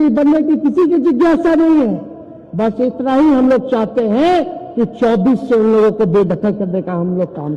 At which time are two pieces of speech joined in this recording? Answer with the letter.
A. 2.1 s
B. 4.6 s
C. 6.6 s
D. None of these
D